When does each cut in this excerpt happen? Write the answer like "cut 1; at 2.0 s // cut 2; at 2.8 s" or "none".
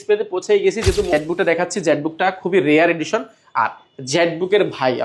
cut 1; at 1.1 s